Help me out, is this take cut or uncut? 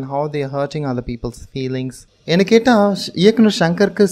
cut